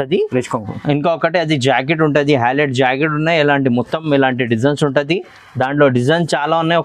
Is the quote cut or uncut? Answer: uncut